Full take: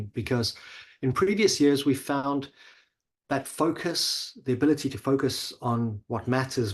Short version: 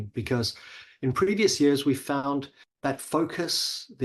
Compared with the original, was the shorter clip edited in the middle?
yes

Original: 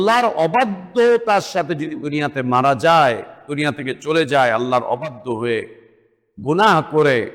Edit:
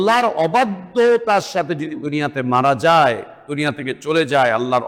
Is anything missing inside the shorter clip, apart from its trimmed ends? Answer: no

